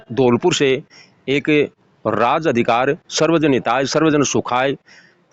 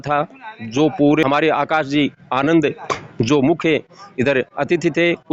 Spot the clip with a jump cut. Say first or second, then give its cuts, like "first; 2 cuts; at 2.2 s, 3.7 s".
second; 1 cut; at 1.2 s